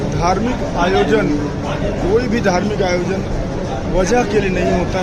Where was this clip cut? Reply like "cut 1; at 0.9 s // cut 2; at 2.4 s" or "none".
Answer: none